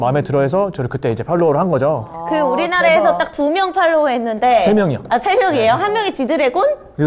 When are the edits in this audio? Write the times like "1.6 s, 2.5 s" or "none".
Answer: none